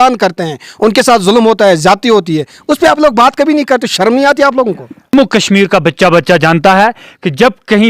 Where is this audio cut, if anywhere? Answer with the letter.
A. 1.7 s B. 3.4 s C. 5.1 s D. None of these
C